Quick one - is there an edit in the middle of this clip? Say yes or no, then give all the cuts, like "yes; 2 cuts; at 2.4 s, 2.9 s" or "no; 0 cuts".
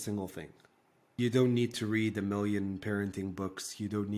yes; 1 cut; at 1.1 s